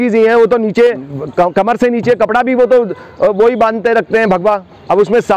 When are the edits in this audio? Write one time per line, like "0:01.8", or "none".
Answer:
0:01.1